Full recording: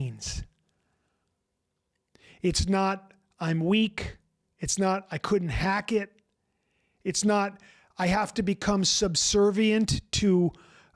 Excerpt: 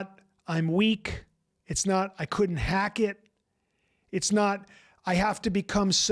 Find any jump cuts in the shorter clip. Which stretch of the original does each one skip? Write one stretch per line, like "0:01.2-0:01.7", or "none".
none